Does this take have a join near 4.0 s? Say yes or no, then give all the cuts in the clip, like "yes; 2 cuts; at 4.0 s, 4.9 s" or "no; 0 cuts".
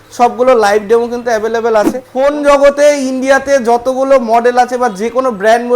no; 1 cut; at 2.0 s